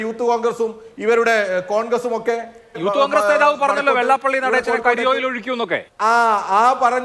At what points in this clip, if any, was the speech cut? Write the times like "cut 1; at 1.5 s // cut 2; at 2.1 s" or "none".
cut 1; at 2.8 s // cut 2; at 5.9 s